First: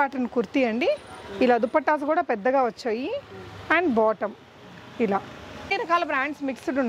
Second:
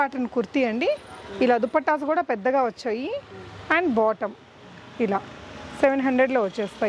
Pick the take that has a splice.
first; 1 cut; at 5.7 s

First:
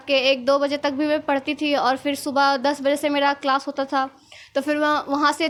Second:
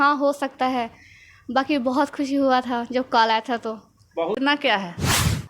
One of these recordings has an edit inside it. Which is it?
second; 1 cut; at 4.4 s

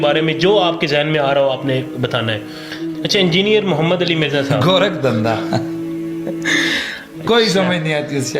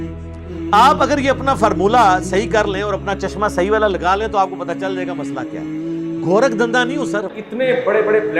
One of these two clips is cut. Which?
second; 3 cuts; at 4.7 s, 6.3 s, 7.3 s

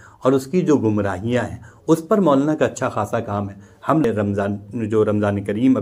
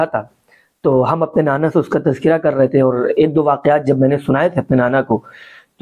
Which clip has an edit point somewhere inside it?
first; 1 cut; at 4.0 s

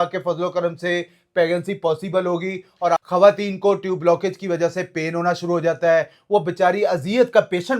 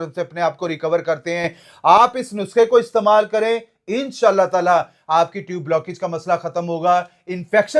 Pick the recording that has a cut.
first; 1 cut; at 3.0 s

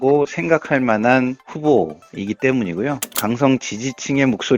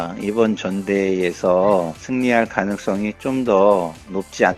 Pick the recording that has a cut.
first; 1 cut; at 3.2 s

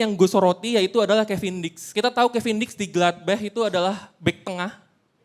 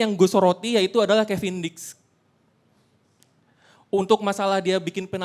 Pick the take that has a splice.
first; 1 cut; at 1.9 s

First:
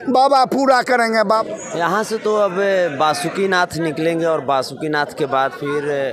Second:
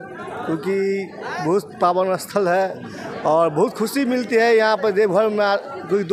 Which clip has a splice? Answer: first; 1 cut; at 1.4 s

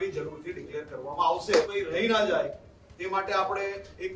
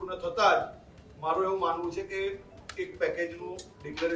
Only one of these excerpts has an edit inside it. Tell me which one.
first; 1 cut; at 1.7 s

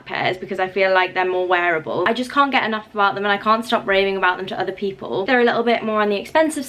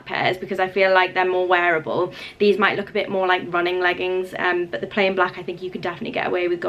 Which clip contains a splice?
first; 2 cuts; at 2.1 s, 5.3 s

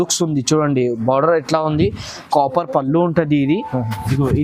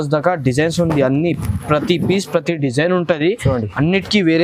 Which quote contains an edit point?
first; 1 cut; at 2.3 s

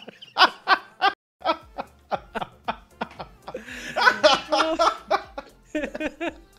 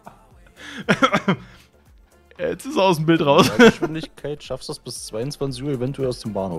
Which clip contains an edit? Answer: first; 1 cut; at 1.3 s

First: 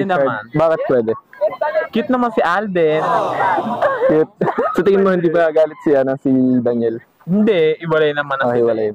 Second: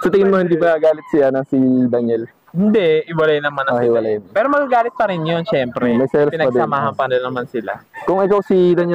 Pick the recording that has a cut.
first; 1 cut; at 3.3 s

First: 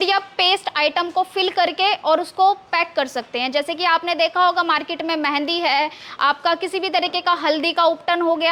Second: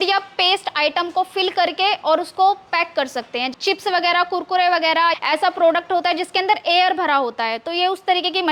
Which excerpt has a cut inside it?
second; 2 cuts; at 3.4 s, 5.2 s

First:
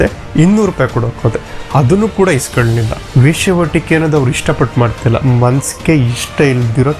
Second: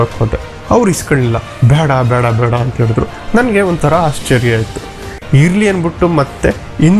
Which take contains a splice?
first; 1 cut; at 3.0 s

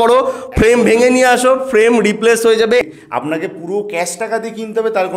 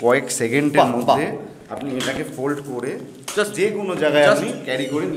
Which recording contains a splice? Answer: first; 1 cut; at 2.8 s

